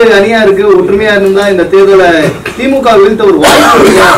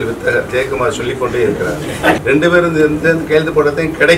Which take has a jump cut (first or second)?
second